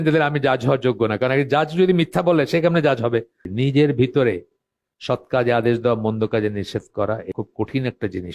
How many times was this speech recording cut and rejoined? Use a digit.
2